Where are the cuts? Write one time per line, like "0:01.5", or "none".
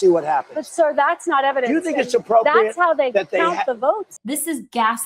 0:04.1